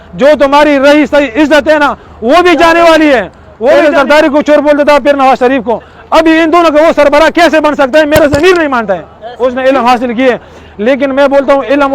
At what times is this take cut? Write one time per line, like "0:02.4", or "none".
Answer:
0:03.7
0:09.2